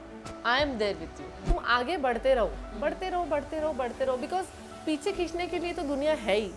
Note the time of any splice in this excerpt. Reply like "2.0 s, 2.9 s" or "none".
1.5 s